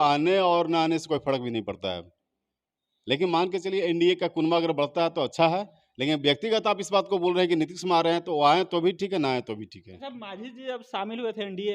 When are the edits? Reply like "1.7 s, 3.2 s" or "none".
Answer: 9.9 s